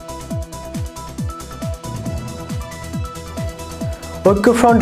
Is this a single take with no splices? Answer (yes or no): yes